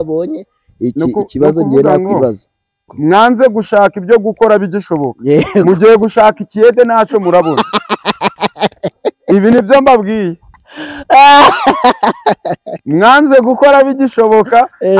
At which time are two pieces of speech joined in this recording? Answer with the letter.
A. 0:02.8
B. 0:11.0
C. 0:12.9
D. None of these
A